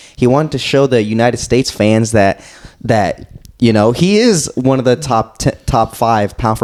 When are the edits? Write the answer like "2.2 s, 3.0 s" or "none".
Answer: none